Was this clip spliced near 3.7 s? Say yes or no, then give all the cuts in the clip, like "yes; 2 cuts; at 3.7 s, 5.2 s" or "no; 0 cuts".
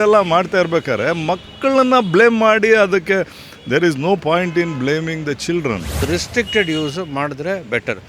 no; 1 cut; at 6.0 s